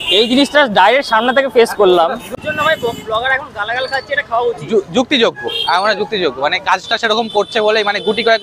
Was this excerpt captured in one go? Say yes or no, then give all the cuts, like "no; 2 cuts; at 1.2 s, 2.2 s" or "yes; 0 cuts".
no; 1 cut; at 2.4 s